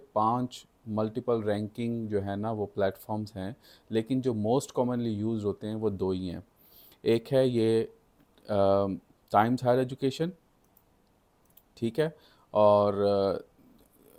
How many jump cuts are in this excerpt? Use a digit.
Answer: 0